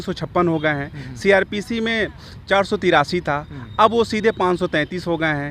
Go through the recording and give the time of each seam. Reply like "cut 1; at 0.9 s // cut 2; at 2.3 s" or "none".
none